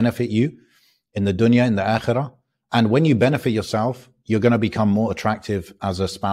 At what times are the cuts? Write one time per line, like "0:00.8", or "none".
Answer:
none